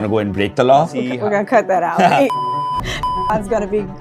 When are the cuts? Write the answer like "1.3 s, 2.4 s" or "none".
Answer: 0.9 s